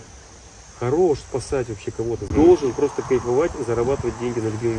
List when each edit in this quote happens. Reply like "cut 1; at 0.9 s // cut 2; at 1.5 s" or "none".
cut 1; at 2.3 s